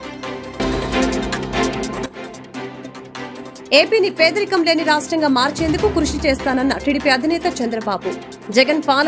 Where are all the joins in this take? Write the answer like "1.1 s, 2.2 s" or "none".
none

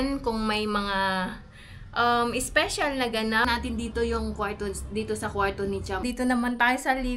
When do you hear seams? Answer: 3.4 s, 6.0 s

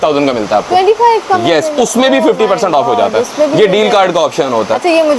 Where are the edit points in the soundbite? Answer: none

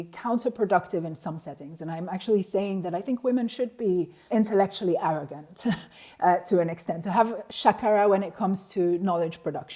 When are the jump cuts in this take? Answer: 4.3 s

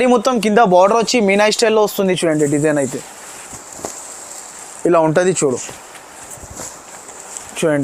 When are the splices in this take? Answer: none

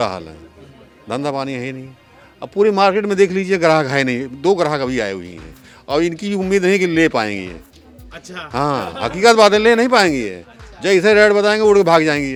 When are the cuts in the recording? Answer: none

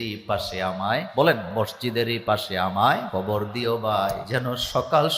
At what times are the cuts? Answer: 3.1 s, 4.2 s

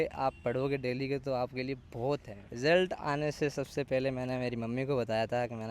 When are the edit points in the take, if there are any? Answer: 2.4 s

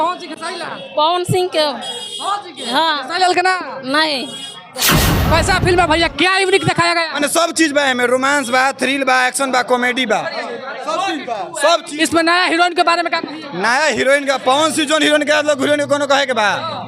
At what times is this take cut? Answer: 5.0 s

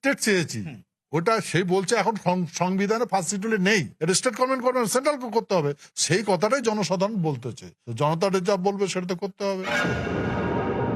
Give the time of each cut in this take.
9.6 s

